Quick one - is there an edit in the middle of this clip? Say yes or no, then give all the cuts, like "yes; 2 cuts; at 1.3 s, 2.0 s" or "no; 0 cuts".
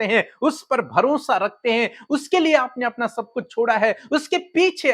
no; 0 cuts